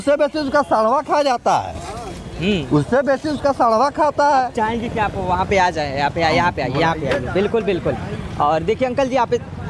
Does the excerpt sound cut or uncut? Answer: uncut